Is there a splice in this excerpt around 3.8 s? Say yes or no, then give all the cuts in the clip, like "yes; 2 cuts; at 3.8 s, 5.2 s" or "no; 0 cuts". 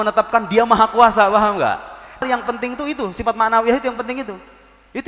no; 1 cut; at 2.3 s